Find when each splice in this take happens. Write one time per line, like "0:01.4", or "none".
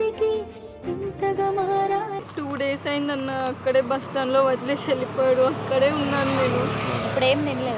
0:02.2

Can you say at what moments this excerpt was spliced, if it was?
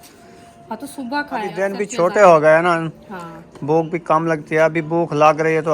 0:01.6

